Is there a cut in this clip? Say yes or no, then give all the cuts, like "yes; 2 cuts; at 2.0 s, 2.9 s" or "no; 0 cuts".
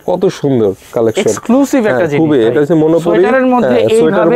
no; 0 cuts